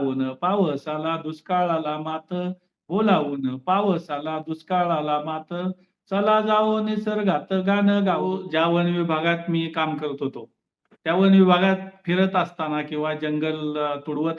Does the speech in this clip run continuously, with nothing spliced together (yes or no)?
no